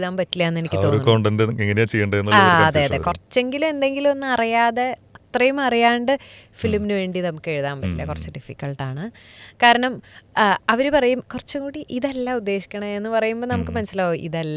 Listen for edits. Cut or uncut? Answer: uncut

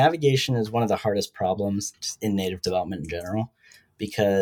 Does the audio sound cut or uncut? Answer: cut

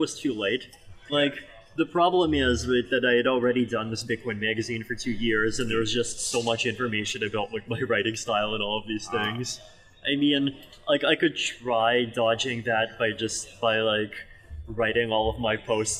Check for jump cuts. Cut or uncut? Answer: uncut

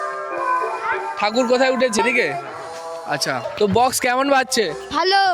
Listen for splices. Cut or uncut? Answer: cut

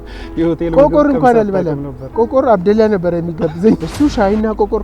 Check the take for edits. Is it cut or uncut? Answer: cut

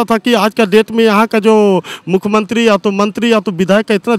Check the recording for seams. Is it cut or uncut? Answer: uncut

